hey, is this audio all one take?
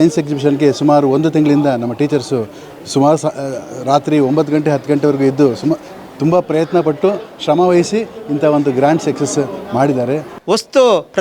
no; 1 cut; at 10.3 s

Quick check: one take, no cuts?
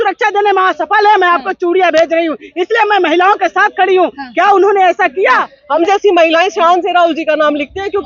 no; 1 cut; at 5.5 s

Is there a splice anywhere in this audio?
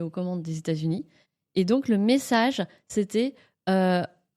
no; 0 cuts

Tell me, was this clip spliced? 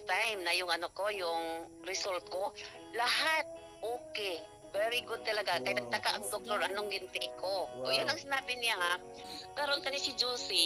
yes; 1 cut; at 9.2 s

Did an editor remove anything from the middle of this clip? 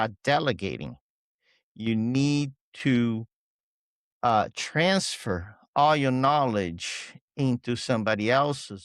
no; 0 cuts

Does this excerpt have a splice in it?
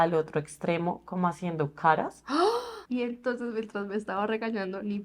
yes; 1 cut; at 3.0 s

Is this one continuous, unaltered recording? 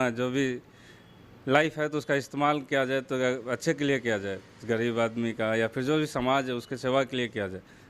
yes; 0 cuts

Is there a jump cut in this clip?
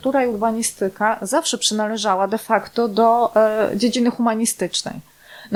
no; 0 cuts

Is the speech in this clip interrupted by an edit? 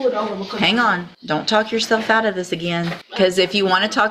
yes; 2 cuts; at 1.1 s, 3.0 s

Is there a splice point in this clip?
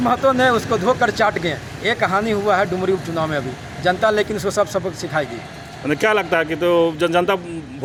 no; 0 cuts

